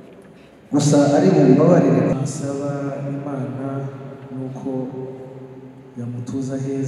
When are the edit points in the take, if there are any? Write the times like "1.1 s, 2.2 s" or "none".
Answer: 2.1 s